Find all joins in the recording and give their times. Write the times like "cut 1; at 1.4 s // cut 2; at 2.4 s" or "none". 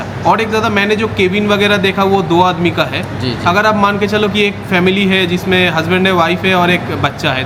none